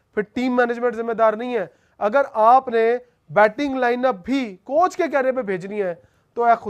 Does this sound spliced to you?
no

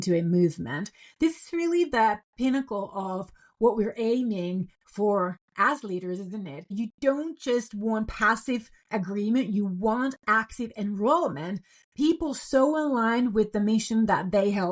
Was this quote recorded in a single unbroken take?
yes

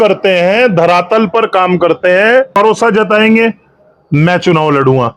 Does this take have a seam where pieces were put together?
yes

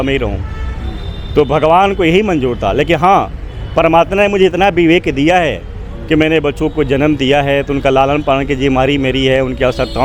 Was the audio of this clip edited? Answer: no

